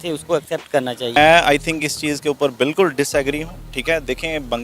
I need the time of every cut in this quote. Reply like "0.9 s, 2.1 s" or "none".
1.0 s